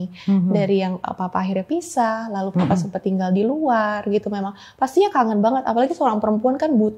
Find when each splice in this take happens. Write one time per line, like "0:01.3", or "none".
none

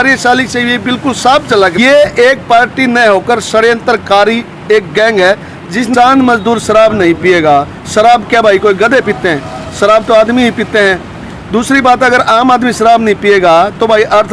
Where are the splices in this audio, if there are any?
0:01.7
0:05.9

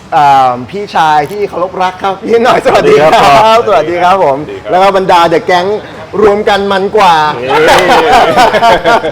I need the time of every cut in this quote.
none

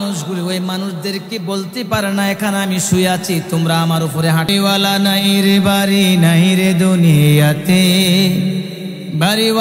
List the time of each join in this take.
0:04.5

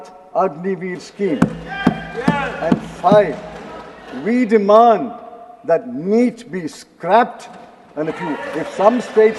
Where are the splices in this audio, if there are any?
none

